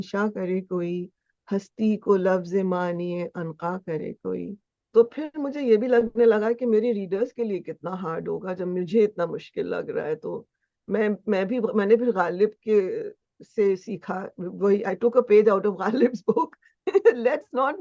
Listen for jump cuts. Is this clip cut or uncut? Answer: cut